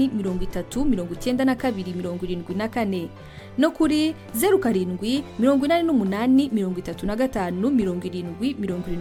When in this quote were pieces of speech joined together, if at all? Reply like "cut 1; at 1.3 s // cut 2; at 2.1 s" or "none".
none